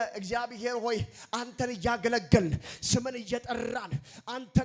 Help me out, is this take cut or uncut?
uncut